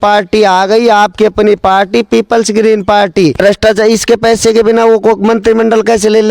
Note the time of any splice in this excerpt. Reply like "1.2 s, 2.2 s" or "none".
3.4 s

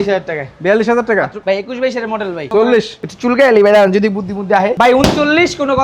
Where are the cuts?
1.4 s, 2.5 s, 4.7 s

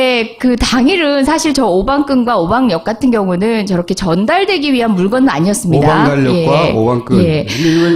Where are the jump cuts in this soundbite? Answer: none

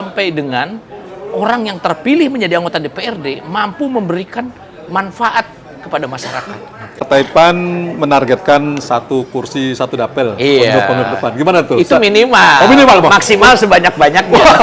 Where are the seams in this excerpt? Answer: 7.0 s

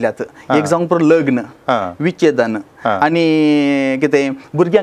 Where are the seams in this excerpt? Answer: none

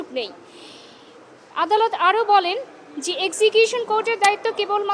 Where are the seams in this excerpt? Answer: 0.9 s

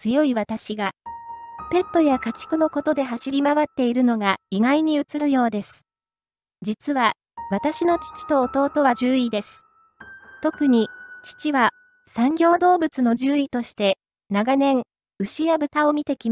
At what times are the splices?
none

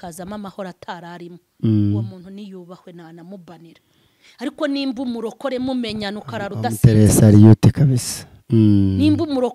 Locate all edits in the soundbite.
none

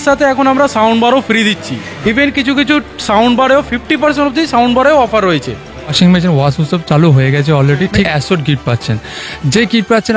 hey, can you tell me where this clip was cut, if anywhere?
1.9 s, 5.8 s, 8.1 s

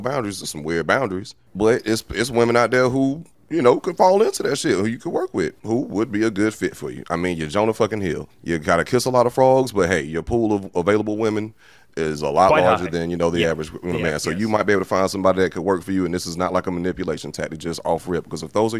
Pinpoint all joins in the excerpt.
none

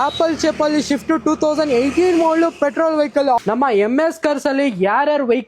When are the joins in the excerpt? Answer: 3.4 s

